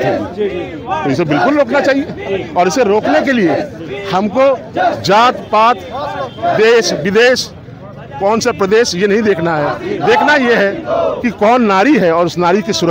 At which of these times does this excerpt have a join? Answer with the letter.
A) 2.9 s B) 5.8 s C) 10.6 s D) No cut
D